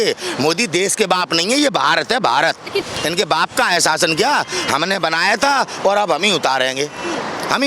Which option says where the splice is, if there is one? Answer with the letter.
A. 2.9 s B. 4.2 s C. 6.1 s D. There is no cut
A